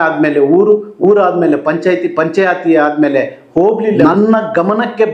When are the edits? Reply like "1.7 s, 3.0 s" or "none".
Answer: 4.0 s